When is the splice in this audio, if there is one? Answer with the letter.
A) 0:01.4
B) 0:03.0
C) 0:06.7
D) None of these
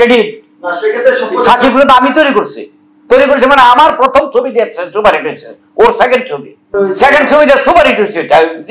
C